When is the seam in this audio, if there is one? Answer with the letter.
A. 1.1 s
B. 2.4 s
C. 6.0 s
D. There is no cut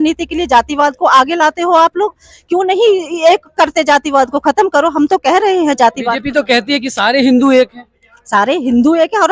D